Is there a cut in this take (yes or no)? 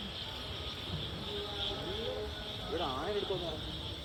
no